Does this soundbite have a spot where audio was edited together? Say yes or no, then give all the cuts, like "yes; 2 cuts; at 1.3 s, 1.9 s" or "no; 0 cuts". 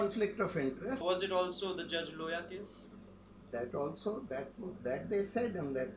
yes; 1 cut; at 1.0 s